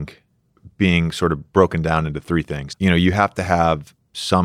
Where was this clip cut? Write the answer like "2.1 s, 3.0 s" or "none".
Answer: 2.3 s